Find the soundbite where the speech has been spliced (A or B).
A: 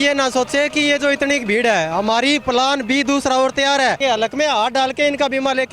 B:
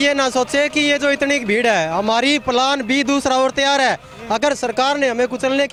A